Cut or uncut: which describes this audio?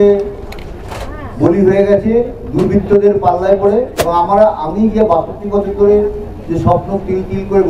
cut